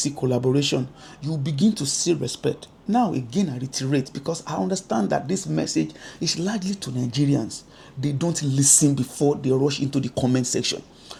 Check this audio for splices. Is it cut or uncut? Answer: uncut